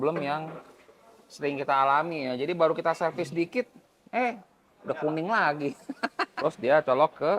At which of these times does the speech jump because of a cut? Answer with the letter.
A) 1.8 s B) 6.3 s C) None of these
B